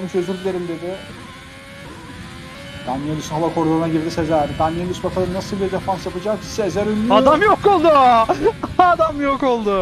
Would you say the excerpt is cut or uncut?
cut